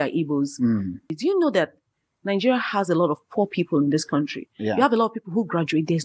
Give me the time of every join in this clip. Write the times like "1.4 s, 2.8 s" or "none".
1.1 s